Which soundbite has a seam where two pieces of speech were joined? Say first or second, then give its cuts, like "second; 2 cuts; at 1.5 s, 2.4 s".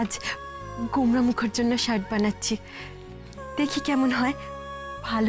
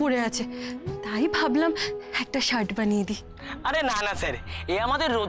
second; 1 cut; at 3.3 s